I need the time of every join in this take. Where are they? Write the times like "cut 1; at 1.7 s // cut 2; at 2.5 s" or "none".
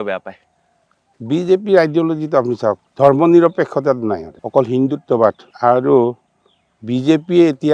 cut 1; at 2.8 s // cut 2; at 4.3 s // cut 3; at 5.5 s